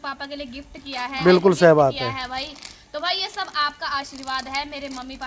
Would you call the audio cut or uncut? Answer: cut